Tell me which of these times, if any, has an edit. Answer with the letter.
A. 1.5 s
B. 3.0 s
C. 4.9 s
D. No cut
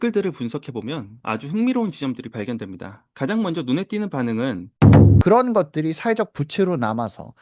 C